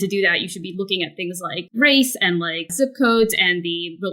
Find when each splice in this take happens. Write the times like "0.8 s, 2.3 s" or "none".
1.7 s, 2.6 s